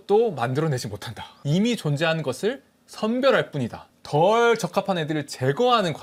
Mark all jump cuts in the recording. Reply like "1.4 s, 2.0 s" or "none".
none